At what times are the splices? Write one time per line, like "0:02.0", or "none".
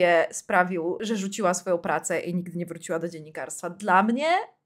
0:01.0